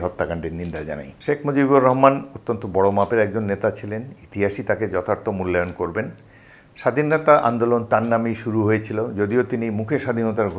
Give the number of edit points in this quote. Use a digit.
1